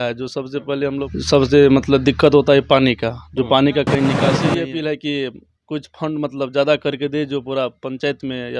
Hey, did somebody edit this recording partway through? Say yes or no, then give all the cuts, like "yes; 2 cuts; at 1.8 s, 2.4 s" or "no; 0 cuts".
yes; 2 cuts; at 1.1 s, 4.4 s